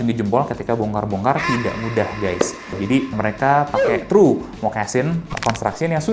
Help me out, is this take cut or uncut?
uncut